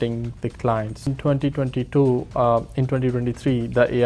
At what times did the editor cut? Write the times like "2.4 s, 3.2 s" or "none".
1.1 s